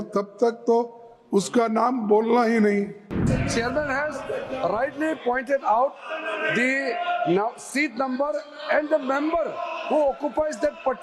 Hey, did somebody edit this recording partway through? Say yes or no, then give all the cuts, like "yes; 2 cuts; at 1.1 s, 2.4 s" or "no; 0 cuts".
yes; 1 cut; at 3.3 s